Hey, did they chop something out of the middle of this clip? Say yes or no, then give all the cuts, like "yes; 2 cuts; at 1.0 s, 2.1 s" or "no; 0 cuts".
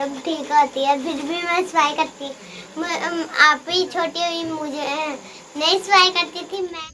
no; 0 cuts